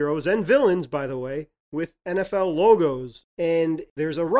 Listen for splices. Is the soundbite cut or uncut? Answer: cut